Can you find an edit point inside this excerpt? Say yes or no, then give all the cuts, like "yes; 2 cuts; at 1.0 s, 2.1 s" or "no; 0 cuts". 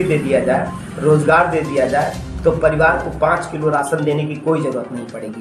no; 0 cuts